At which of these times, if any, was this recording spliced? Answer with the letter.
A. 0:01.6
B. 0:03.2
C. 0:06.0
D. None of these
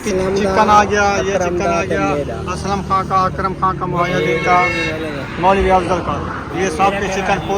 D